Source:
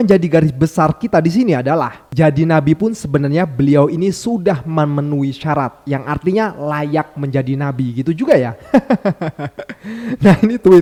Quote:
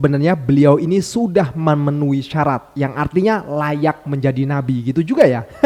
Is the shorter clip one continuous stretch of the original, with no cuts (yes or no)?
yes